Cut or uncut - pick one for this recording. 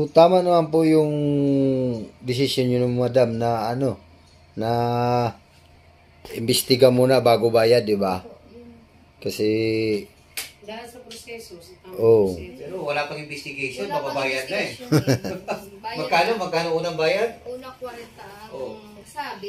uncut